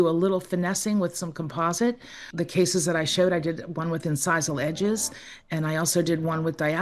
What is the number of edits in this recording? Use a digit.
1